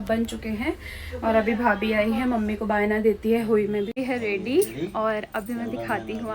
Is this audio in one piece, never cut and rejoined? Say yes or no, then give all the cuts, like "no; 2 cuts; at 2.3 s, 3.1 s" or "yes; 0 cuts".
no; 1 cut; at 4.0 s